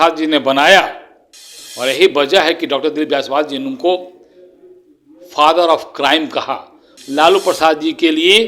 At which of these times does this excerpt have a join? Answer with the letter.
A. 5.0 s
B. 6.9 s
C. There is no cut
B